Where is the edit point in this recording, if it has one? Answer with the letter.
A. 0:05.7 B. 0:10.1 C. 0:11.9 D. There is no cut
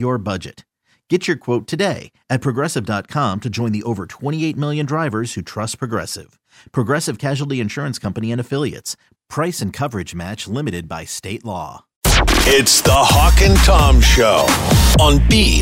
C